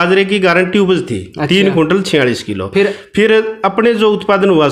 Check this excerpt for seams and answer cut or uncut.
uncut